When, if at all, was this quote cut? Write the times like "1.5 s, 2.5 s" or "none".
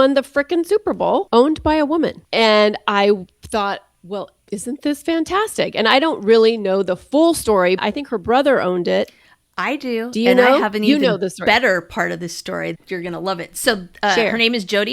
1.3 s, 2.2 s, 7.8 s, 12.8 s